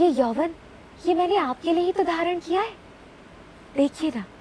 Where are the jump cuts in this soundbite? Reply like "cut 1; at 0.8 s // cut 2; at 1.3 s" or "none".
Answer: none